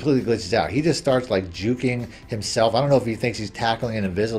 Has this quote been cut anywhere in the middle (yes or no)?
no